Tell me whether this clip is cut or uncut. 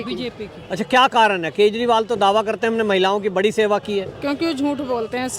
uncut